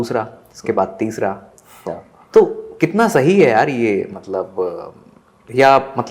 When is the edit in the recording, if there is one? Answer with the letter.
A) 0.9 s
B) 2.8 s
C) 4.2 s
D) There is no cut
D